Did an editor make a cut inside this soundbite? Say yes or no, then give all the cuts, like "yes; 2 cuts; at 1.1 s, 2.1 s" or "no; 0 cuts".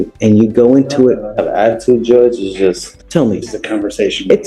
yes; 1 cut; at 3.0 s